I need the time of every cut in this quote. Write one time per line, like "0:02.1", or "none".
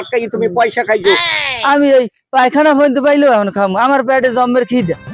0:01.3